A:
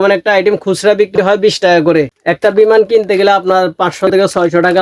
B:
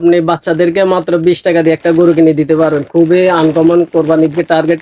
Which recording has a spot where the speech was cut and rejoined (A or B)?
A